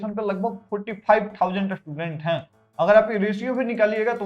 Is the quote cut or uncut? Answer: uncut